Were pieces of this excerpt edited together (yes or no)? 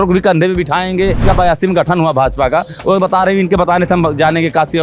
yes